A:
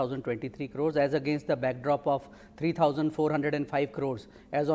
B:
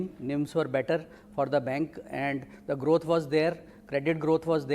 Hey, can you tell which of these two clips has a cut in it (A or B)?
B